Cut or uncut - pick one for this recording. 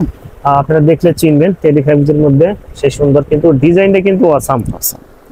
uncut